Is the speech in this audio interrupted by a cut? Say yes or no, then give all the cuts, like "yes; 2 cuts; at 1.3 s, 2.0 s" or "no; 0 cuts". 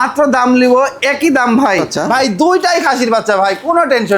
yes; 1 cut; at 1.9 s